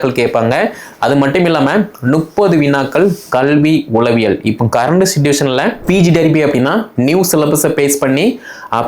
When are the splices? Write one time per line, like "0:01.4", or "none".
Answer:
0:05.8